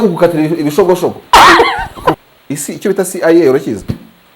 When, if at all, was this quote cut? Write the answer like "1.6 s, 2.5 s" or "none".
2.2 s